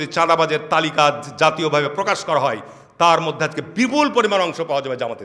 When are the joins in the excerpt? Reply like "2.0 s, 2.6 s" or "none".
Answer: none